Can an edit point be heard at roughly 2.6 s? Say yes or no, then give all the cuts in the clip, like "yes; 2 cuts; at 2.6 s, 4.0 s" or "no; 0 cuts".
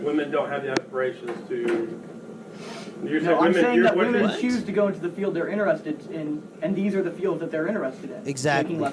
no; 0 cuts